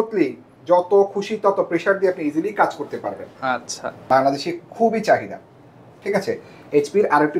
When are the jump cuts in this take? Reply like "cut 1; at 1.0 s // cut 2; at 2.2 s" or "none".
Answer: cut 1; at 4.0 s